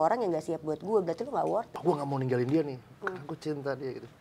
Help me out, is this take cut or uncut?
cut